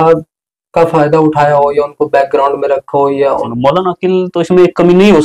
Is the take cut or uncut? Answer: cut